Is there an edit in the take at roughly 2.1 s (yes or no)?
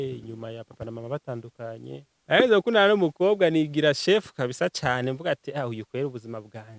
yes